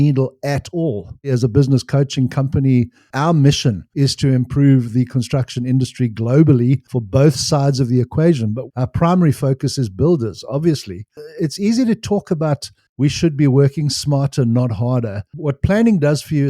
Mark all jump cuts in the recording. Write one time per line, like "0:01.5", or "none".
0:01.3
0:03.1
0:08.7
0:11.1
0:15.2